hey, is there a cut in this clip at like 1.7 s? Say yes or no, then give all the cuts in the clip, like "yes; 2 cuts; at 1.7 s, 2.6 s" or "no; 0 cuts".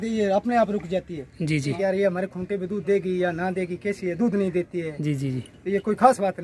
yes; 1 cut; at 1.7 s